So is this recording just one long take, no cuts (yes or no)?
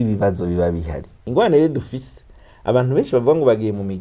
no